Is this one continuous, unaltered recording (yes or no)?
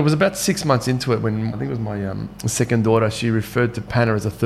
no